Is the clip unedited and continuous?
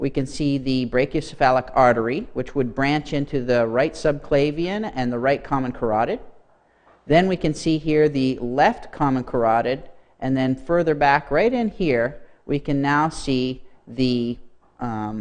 no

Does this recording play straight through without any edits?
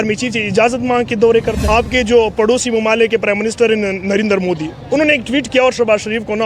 no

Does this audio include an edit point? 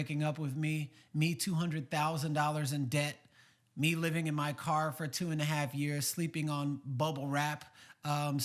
no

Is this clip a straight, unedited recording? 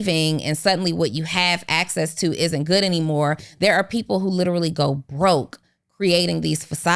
no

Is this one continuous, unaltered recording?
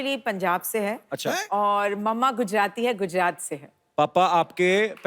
yes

